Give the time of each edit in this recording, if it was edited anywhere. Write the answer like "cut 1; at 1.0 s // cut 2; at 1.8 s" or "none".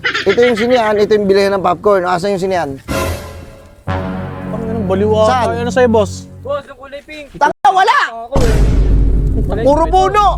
none